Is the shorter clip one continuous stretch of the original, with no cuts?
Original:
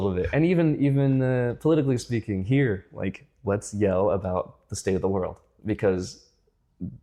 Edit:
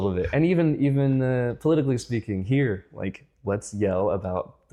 yes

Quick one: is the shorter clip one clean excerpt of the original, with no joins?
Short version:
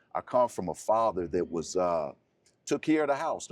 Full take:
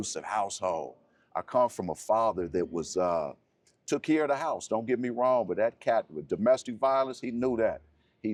yes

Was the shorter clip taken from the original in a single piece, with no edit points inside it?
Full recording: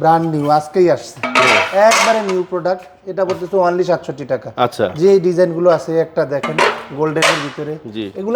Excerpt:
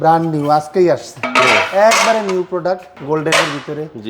no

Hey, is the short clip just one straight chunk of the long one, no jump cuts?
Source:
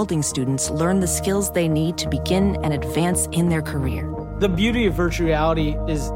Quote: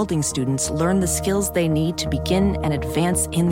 yes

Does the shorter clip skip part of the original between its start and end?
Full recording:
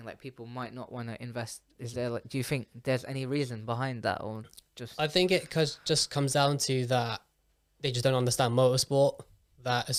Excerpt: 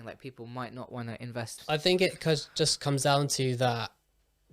yes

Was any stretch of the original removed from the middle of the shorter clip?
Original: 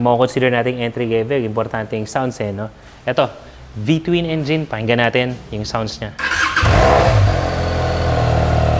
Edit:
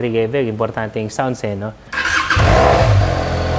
yes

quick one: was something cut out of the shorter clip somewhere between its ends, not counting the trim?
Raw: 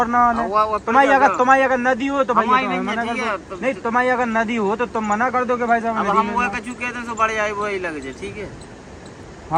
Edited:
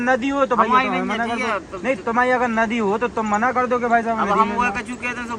no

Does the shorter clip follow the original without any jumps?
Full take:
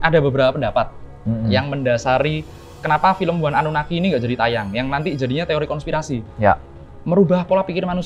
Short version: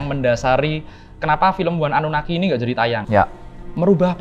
no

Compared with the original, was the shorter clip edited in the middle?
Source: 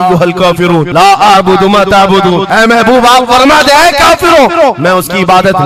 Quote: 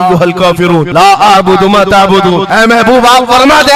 no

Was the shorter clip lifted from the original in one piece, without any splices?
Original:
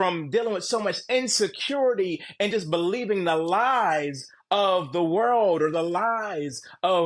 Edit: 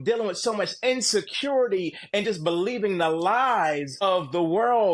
no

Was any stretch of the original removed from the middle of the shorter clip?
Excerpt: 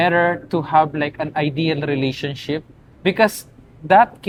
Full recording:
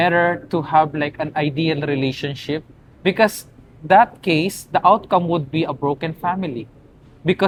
no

